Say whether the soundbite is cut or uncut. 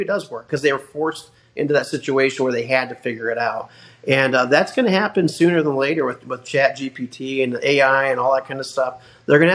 uncut